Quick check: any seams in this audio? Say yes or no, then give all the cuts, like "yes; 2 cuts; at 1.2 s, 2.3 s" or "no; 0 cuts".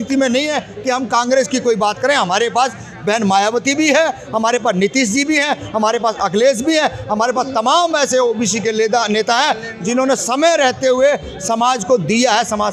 no; 0 cuts